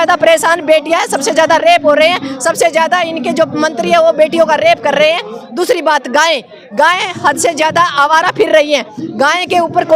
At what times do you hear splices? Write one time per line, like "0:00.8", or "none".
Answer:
none